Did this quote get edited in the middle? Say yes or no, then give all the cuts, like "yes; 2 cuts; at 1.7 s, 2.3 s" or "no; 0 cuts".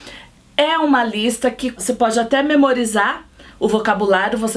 yes; 1 cut; at 1.8 s